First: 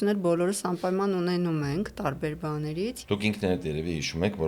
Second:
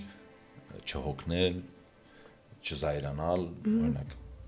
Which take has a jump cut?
first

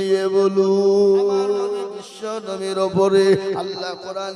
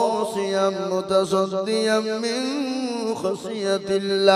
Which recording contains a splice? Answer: first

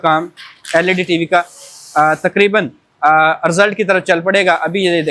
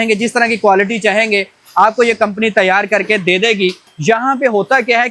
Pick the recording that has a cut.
second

